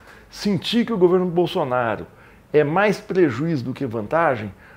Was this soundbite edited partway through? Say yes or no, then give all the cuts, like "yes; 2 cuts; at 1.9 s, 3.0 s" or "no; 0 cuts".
no; 0 cuts